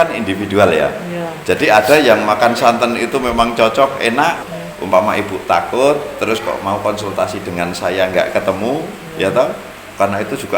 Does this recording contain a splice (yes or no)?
yes